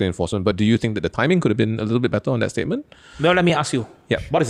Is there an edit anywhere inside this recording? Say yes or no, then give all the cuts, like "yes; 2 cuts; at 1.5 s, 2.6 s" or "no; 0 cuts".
no; 0 cuts